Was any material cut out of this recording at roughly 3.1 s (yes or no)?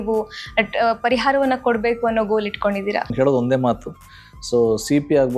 yes